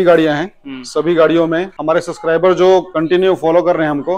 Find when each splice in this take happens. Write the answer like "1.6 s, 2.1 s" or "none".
1.7 s, 2.9 s